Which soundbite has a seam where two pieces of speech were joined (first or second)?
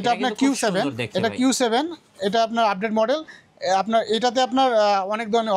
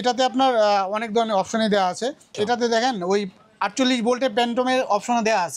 second